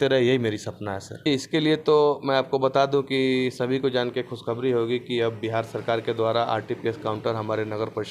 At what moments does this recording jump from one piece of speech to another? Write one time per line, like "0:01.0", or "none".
0:01.3